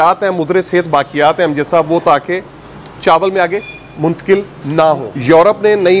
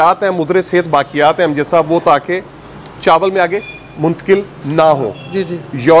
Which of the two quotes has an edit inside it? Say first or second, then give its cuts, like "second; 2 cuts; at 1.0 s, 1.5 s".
first; 1 cut; at 5.1 s